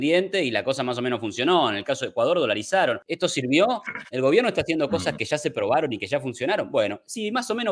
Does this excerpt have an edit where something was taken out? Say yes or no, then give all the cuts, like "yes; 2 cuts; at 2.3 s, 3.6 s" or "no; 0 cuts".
yes; 1 cut; at 3.1 s